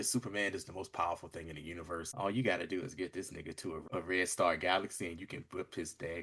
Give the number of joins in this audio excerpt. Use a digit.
2